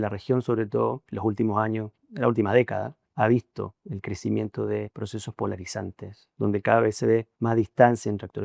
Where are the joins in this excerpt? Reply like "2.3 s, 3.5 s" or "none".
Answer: 1.1 s, 3.0 s, 3.9 s, 5.0 s, 7.3 s